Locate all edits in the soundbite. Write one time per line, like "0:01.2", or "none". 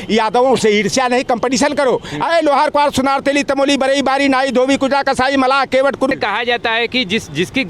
0:06.1